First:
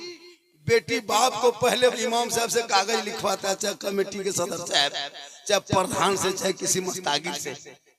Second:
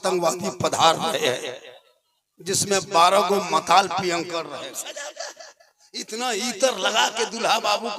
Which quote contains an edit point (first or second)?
second